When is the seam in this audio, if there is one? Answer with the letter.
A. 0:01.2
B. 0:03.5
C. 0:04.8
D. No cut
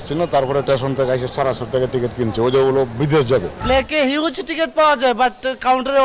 B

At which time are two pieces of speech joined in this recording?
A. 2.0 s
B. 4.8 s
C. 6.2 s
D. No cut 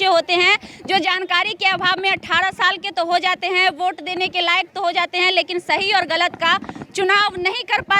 D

